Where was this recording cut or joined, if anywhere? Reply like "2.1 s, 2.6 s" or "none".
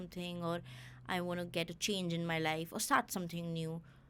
none